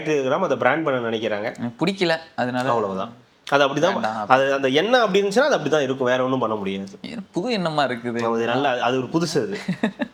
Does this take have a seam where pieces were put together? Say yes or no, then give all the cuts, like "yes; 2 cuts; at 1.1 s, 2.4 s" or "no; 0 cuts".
no; 0 cuts